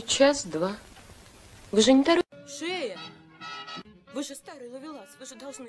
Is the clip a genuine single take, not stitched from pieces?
no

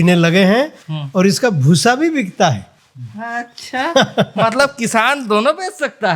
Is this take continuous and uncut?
yes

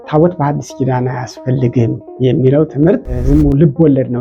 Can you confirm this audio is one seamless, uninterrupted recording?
no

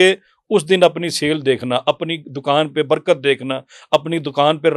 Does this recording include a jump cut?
no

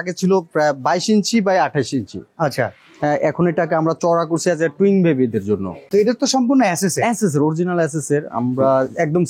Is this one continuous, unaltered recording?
no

